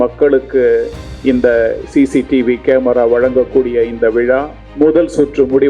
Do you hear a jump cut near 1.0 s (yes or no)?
no